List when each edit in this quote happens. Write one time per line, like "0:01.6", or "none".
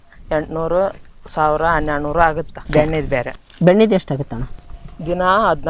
0:02.6